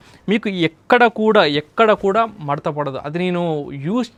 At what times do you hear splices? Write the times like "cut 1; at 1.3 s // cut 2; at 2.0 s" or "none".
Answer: none